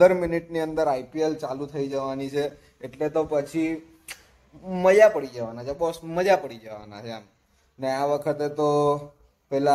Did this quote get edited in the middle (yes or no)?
no